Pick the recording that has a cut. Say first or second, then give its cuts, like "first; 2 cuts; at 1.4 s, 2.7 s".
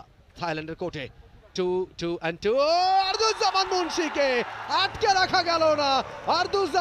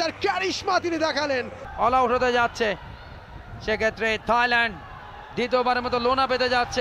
second; 1 cut; at 1.6 s